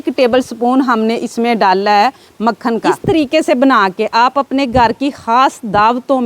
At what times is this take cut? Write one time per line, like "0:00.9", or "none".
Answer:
0:02.9